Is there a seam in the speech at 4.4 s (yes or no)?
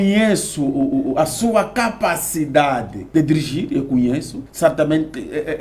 yes